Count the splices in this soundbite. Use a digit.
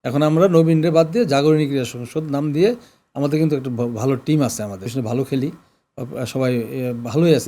1